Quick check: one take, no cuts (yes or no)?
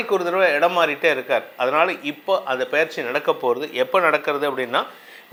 yes